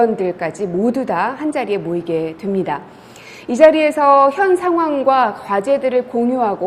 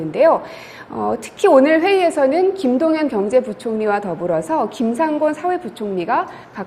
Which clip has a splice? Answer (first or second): first